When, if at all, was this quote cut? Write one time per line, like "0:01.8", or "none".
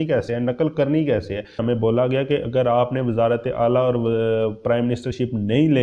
0:01.6